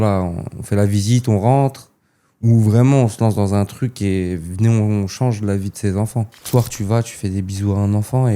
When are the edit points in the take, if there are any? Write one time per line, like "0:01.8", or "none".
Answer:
0:06.4

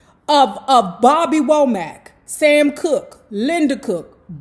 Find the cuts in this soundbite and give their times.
none

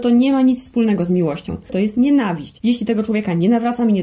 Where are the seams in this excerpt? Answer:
0:01.7
0:02.5

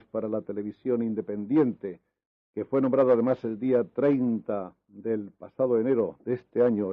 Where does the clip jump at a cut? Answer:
0:01.2
0:03.9

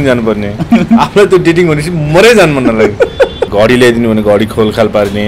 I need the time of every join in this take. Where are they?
0:03.5

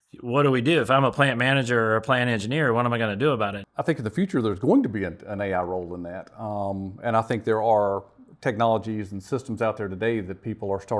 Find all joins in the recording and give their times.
0:03.6

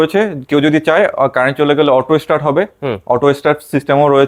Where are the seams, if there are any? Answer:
none

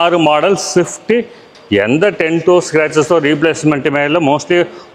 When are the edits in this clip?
0:01.4

